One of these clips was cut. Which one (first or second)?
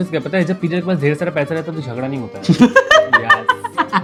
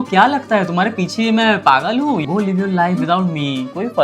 second